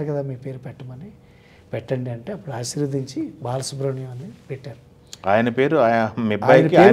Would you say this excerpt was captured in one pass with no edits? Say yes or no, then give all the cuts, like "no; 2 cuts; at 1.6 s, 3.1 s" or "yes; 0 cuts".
yes; 0 cuts